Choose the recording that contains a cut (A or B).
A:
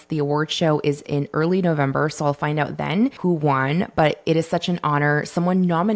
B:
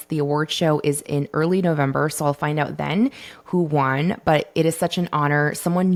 A